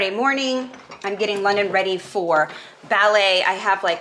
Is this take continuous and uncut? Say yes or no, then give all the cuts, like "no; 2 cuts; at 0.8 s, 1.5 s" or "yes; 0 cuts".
yes; 0 cuts